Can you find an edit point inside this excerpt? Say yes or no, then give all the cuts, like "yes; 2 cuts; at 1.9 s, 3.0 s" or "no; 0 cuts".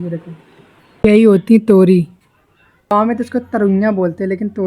yes; 2 cuts; at 1.0 s, 2.9 s